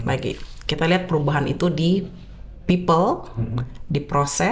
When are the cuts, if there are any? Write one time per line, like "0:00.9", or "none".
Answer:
none